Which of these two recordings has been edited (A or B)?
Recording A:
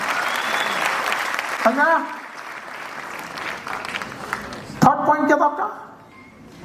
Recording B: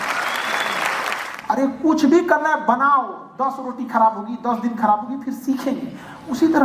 B